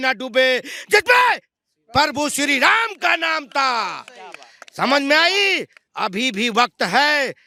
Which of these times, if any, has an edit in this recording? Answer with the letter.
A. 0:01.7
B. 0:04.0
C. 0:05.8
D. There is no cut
D